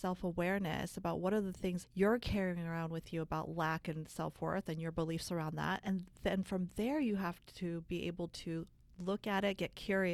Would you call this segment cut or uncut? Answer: uncut